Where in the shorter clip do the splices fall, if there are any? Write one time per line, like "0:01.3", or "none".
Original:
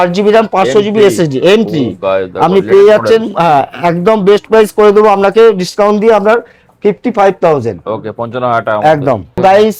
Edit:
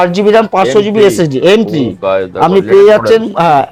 none